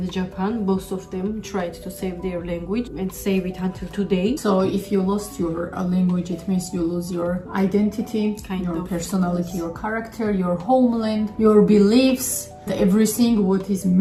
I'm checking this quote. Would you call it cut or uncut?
uncut